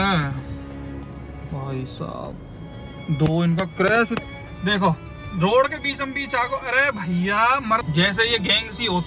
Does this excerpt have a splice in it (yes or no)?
yes